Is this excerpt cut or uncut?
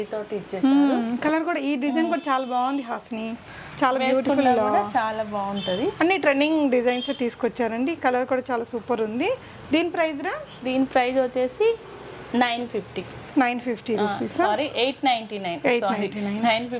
uncut